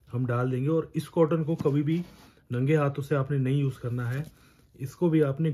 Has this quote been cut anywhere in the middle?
no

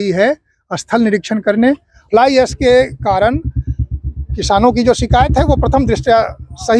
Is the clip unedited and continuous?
no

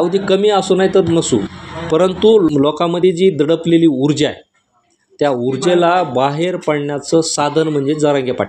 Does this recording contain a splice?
yes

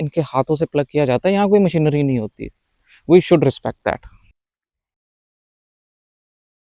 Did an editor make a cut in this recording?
no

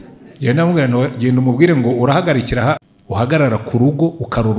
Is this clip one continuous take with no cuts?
no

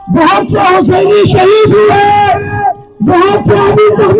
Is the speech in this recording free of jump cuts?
yes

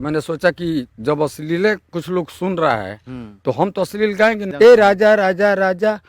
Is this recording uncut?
no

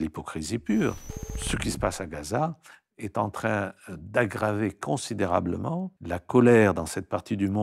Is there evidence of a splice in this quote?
yes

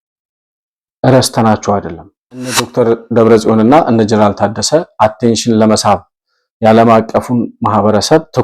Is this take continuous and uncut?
no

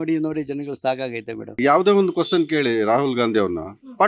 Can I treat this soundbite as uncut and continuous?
no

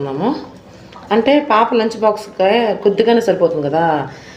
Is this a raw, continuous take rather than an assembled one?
yes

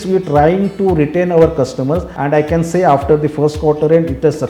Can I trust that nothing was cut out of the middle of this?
no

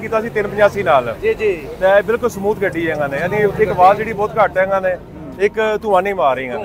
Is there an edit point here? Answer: no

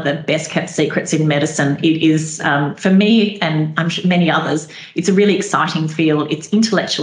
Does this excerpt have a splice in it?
no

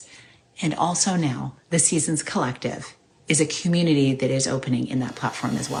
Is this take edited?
no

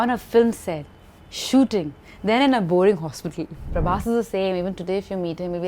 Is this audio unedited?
no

